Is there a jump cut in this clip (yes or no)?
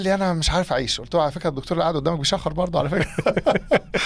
no